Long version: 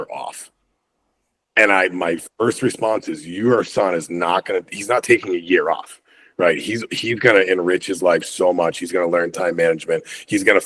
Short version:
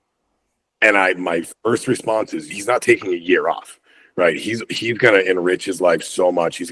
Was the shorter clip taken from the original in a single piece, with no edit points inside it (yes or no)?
no